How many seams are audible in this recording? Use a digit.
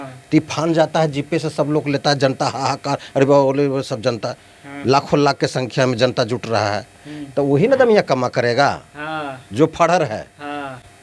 0